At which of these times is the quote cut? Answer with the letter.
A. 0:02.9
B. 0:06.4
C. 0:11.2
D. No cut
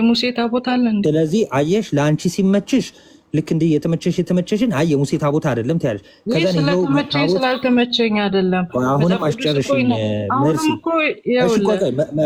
D